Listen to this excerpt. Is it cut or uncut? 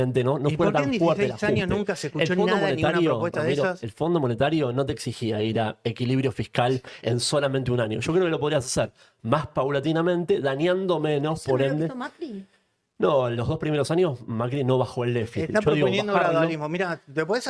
uncut